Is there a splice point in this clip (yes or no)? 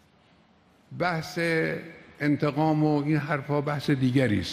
no